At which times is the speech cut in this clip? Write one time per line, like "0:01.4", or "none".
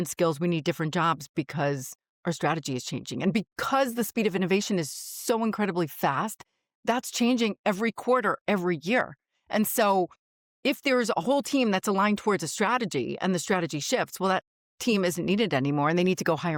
none